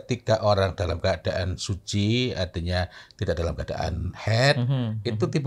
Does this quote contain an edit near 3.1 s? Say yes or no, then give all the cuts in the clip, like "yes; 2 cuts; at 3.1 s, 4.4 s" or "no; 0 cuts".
no; 0 cuts